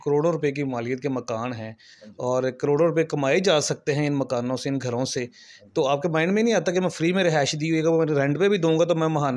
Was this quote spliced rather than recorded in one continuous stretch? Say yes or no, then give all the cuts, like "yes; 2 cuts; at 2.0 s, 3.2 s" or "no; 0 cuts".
no; 0 cuts